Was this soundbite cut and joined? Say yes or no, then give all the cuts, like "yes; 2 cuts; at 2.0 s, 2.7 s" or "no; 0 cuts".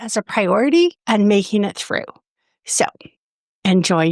yes; 1 cut; at 1.0 s